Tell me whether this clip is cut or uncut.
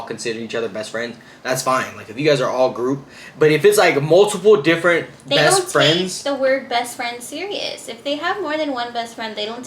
uncut